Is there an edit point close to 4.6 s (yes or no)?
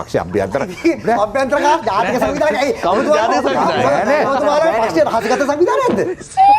no